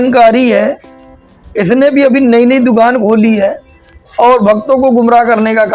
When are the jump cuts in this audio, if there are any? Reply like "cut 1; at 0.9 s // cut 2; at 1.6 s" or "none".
none